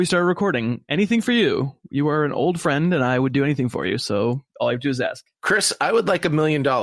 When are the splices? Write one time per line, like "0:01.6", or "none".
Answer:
0:04.5
0:05.3